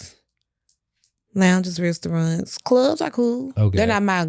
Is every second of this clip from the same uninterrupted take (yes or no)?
yes